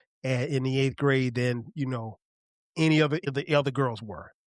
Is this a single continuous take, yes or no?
no